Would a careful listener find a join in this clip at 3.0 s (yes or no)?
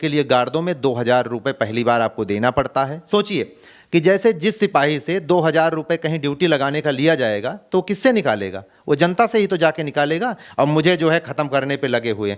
yes